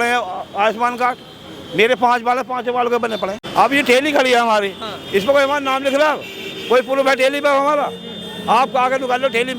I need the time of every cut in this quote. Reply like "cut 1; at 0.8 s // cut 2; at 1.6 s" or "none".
cut 1; at 3.4 s

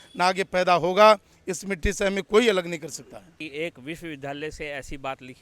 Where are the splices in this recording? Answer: cut 1; at 3.4 s

